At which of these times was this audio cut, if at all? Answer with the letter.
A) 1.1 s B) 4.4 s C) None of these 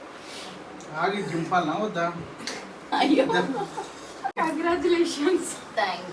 B